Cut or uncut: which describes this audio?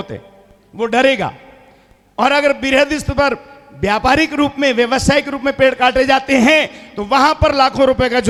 uncut